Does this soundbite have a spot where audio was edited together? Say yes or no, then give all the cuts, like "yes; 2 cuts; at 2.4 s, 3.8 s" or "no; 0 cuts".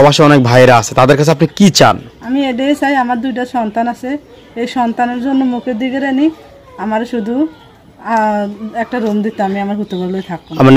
no; 0 cuts